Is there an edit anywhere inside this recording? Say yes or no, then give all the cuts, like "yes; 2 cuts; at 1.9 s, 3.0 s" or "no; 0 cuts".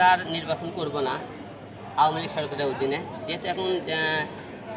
no; 0 cuts